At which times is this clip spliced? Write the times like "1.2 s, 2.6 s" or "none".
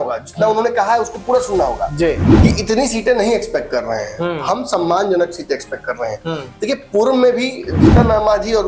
2.3 s